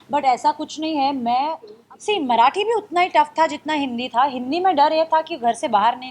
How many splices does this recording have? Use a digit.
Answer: 1